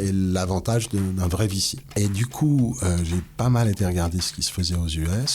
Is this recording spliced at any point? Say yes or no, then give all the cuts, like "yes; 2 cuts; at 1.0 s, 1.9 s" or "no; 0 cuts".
yes; 1 cut; at 1.8 s